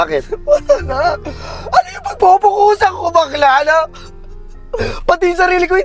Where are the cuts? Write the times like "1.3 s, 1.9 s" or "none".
none